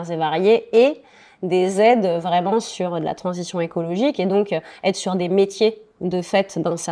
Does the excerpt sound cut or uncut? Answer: uncut